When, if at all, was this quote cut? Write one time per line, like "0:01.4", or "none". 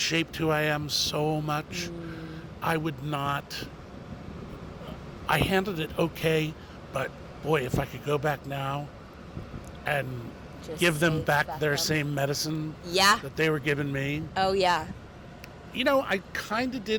none